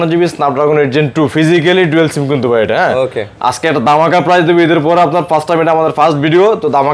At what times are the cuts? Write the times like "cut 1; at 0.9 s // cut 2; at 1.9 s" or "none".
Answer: none